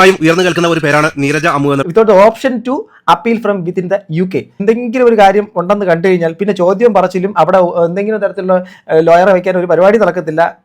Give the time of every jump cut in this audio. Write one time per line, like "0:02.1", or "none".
0:01.8
0:04.6